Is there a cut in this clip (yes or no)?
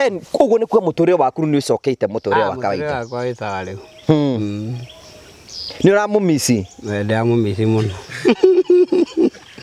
no